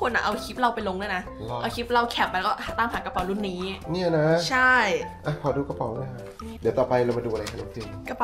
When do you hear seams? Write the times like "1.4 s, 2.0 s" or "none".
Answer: 6.5 s